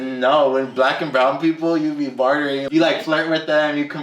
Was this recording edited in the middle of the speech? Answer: yes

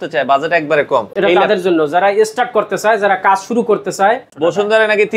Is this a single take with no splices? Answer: no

